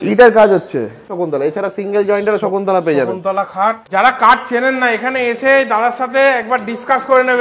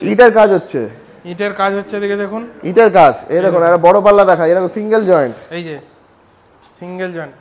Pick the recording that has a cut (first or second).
first